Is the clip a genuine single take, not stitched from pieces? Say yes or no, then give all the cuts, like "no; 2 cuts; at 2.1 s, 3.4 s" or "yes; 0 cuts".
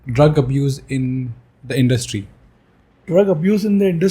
yes; 0 cuts